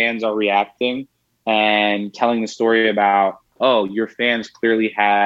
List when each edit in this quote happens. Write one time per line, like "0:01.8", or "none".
none